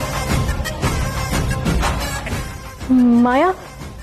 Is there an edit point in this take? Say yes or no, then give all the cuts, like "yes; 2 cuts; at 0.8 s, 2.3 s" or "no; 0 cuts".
yes; 1 cut; at 2.7 s